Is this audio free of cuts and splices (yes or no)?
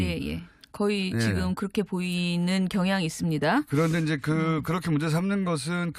yes